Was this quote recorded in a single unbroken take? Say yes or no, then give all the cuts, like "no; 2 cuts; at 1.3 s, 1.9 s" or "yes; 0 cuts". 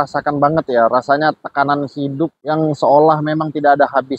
yes; 0 cuts